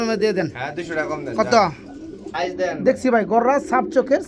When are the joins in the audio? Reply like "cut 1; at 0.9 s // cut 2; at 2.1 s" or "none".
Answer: cut 1; at 2.3 s